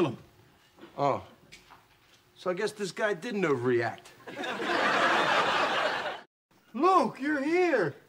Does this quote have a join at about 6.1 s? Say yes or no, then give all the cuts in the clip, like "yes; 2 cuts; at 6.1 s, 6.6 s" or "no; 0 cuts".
yes; 1 cut; at 6.1 s